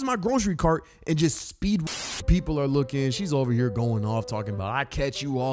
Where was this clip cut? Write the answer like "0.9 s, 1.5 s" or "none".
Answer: 1.8 s